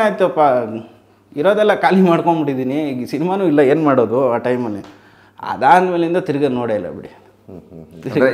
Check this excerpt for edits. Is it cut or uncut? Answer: uncut